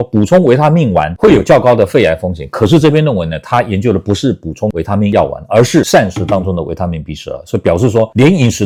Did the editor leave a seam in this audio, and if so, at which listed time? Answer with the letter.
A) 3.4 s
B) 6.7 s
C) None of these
C